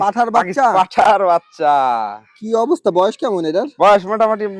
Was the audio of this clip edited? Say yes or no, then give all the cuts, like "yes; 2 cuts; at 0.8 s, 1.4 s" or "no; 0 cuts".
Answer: no; 0 cuts